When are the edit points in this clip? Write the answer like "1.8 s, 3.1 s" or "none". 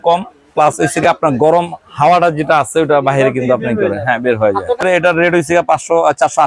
4.8 s